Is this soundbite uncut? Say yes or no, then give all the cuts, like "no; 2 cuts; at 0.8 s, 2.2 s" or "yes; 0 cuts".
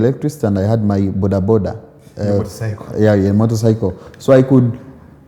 yes; 0 cuts